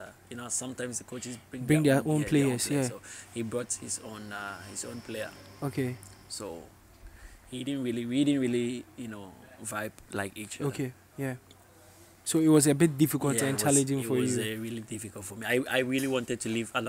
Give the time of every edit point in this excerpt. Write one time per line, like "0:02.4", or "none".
none